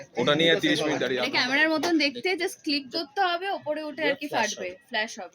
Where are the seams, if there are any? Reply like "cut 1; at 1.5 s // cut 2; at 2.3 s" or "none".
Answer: cut 1; at 1.2 s